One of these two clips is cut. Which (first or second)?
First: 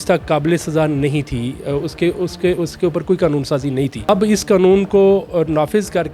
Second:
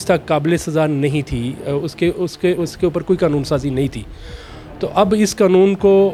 first